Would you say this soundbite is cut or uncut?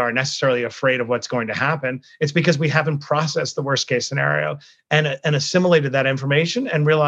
uncut